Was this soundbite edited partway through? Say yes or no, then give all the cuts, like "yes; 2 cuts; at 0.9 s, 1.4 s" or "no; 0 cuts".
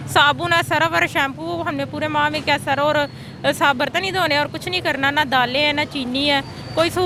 no; 0 cuts